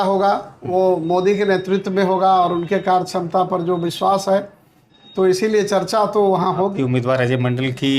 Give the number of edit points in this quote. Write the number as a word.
one